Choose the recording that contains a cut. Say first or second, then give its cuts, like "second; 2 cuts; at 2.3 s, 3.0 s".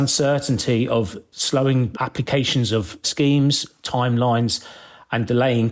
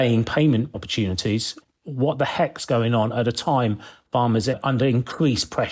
second; 2 cuts; at 1.6 s, 4.6 s